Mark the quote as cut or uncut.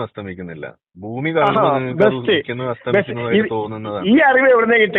uncut